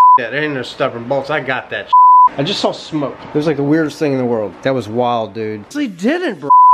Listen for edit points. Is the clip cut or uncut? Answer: cut